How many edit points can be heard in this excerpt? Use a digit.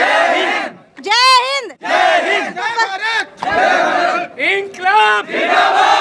0